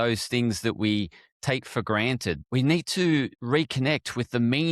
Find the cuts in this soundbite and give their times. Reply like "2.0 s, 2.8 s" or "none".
2.4 s, 3.4 s